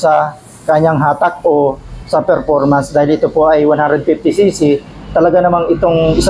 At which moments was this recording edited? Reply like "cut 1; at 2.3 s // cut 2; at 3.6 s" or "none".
none